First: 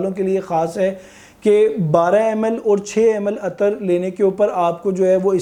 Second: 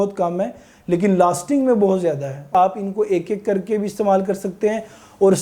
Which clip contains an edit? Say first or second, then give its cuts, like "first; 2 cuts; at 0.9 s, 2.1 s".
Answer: second; 1 cut; at 2.5 s